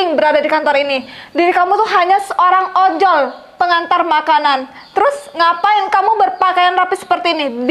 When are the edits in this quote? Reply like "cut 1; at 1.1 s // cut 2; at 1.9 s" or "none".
none